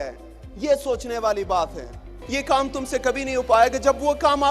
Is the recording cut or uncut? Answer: cut